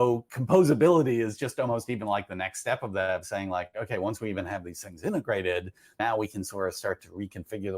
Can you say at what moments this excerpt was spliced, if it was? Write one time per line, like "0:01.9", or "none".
0:06.0

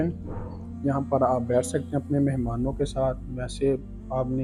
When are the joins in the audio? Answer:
none

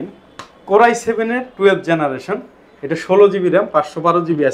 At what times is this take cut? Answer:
none

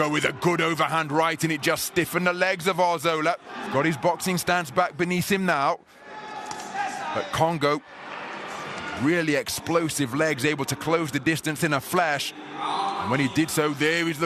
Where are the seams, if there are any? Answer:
none

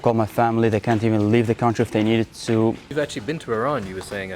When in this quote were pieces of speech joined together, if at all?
0:02.8

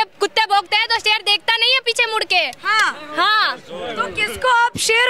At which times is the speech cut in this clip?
none

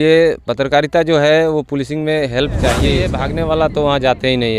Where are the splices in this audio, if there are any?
0:03.2

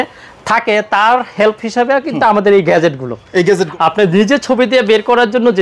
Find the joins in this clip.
0:03.7

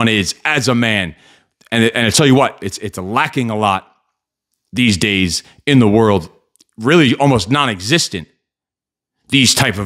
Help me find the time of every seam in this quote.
none

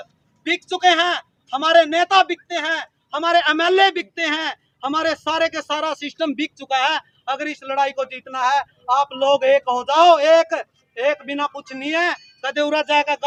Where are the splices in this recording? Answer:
none

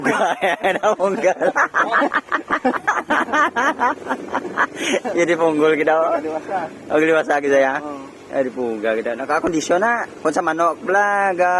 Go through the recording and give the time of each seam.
0:02.8

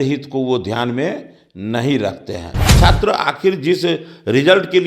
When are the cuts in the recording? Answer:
0:02.6

